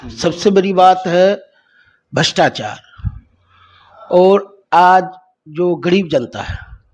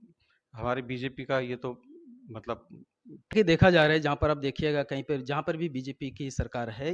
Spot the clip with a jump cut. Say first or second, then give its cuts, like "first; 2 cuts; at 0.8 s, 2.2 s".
second; 1 cut; at 3.3 s